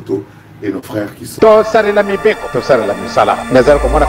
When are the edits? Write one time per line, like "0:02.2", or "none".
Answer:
0:01.4